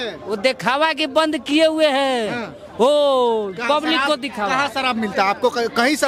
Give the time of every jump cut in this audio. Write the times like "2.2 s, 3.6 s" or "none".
none